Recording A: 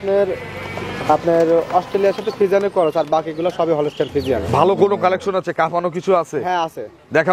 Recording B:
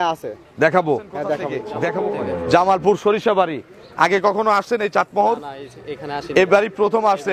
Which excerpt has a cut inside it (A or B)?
B